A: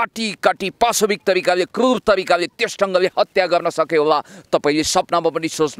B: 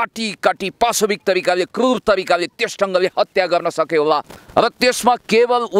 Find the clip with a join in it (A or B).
B